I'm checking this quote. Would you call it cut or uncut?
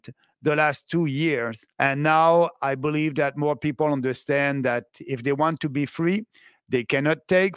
cut